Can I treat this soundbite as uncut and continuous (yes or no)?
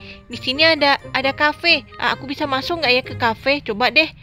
yes